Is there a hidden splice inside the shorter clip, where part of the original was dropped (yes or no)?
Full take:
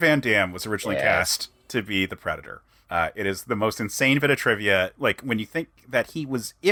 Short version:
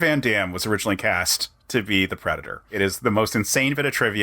yes